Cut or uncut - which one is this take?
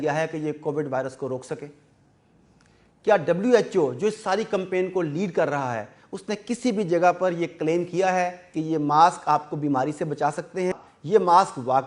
cut